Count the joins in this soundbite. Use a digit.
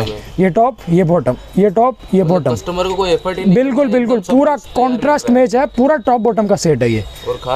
0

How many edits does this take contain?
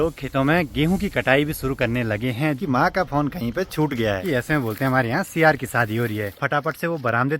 3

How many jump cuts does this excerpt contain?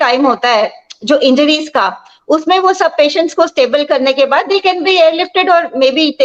0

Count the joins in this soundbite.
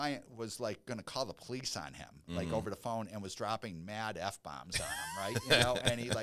0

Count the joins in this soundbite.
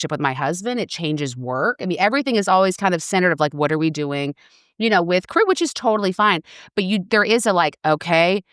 0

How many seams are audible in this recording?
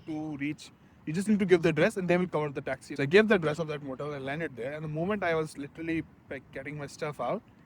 1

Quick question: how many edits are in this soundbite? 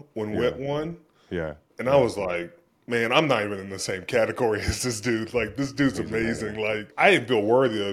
2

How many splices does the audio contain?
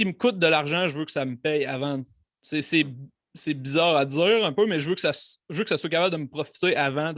0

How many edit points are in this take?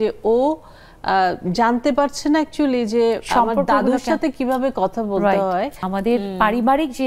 1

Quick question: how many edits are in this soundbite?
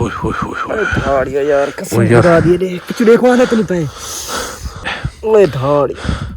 1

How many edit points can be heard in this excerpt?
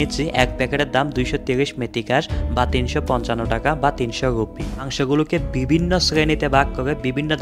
1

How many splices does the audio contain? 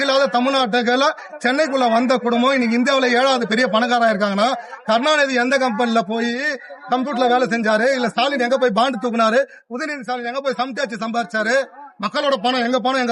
0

